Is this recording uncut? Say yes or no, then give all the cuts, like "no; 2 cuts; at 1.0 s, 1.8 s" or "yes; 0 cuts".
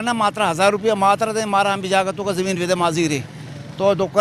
yes; 0 cuts